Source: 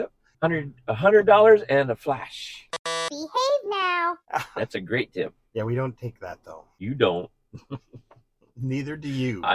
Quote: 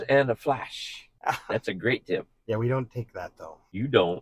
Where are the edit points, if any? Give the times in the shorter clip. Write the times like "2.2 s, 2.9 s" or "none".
1.1 s